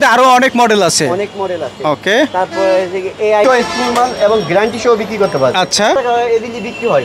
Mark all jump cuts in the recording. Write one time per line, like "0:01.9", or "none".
0:03.4
0:05.9